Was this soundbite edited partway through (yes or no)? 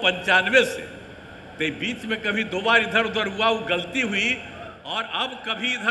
no